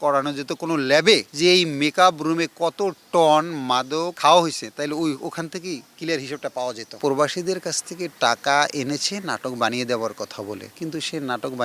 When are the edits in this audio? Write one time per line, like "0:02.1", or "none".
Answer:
0:04.1
0:07.0